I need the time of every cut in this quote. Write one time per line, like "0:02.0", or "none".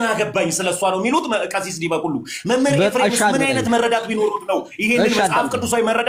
none